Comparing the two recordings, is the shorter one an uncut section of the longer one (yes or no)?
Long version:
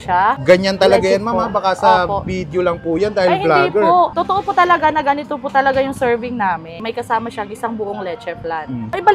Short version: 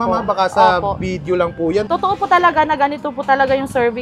no